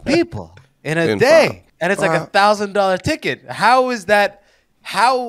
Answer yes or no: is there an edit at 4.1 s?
no